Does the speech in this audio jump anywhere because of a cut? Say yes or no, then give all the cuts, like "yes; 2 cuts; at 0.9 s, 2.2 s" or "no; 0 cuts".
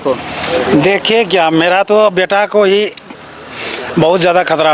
no; 0 cuts